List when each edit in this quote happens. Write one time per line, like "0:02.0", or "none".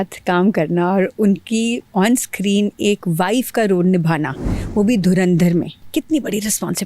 0:05.8